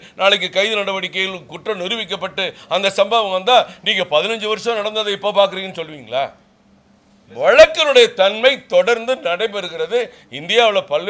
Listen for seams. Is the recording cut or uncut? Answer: uncut